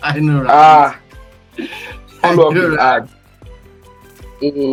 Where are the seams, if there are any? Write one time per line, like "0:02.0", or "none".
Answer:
none